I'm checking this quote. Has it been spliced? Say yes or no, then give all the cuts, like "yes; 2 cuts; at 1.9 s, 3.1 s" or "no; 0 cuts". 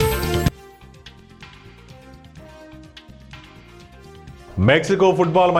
no; 0 cuts